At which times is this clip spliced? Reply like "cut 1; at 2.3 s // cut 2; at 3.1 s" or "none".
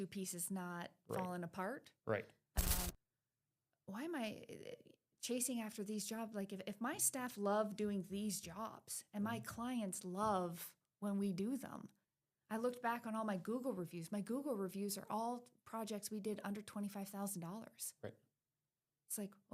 cut 1; at 2.9 s